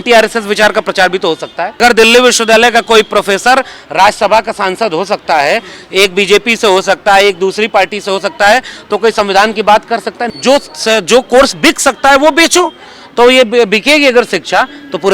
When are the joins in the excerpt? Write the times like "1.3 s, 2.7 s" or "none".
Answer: 1.8 s, 10.2 s